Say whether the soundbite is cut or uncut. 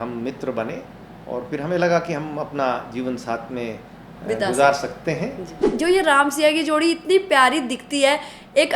cut